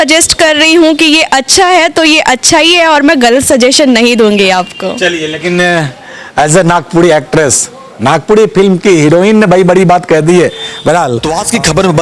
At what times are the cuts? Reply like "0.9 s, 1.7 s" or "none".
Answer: none